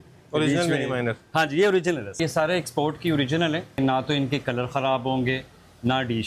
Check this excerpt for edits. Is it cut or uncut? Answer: cut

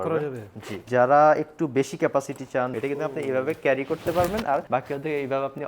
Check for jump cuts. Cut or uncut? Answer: cut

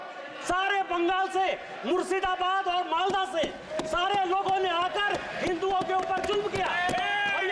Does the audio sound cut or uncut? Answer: uncut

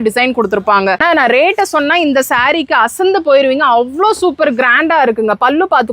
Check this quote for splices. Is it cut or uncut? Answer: cut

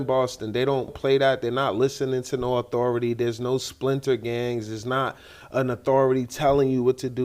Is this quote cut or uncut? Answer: cut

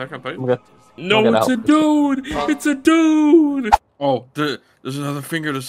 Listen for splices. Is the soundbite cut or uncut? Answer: cut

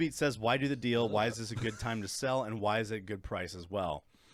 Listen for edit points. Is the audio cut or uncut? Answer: uncut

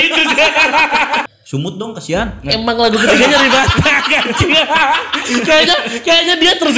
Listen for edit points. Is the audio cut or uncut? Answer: cut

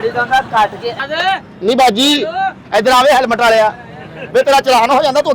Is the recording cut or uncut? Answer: cut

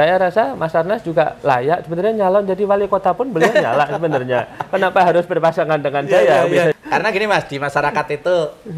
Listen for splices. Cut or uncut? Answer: cut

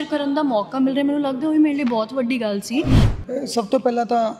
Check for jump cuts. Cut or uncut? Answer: cut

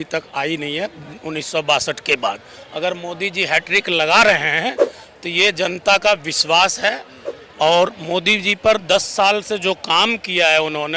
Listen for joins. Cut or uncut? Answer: uncut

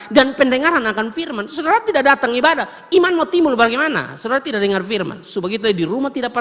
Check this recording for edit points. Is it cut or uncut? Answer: uncut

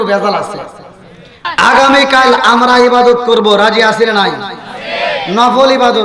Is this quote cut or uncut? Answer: cut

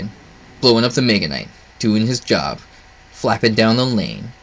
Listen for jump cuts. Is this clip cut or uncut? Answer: uncut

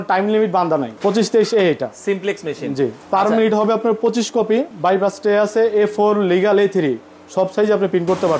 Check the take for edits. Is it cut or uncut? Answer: cut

